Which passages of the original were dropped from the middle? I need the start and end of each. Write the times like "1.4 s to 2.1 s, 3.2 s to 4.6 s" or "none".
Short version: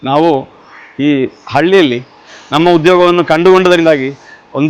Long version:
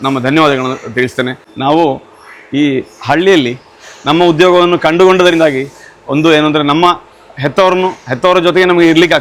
none